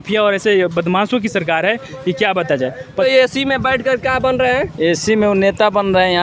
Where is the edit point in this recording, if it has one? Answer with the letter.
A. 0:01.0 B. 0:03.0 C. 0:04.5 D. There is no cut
B